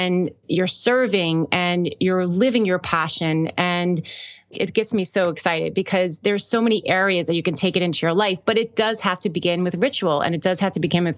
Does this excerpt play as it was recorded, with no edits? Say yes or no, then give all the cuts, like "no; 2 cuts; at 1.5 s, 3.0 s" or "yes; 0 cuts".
yes; 0 cuts